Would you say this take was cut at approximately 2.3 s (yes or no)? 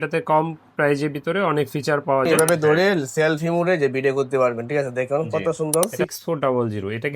yes